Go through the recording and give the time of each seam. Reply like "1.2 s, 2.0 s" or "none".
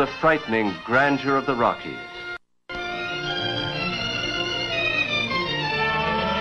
none